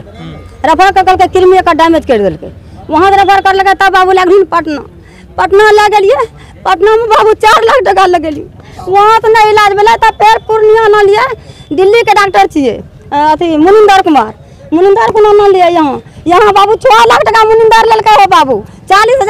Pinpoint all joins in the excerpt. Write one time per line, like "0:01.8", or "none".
none

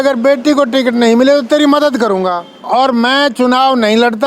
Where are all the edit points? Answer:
0:02.5

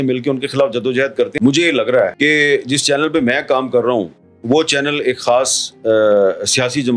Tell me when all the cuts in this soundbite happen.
0:01.3

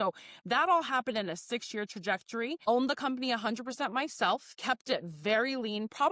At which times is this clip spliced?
0:02.7
0:04.5

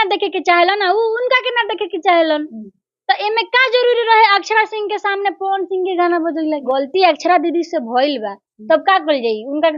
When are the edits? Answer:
0:06.6

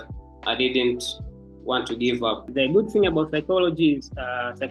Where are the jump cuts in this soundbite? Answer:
0:02.4

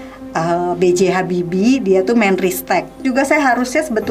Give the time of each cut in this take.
0:03.0

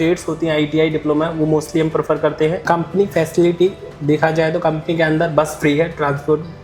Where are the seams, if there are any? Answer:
0:02.6

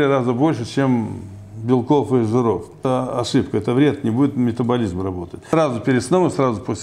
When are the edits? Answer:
0:02.8
0:05.5

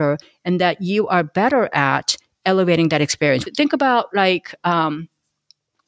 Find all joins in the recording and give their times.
none

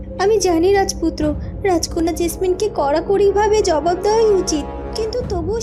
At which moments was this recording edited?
none

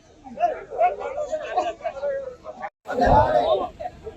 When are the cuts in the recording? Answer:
0:02.8

